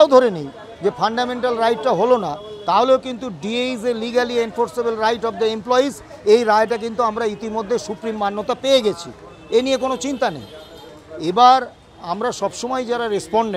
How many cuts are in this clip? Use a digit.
0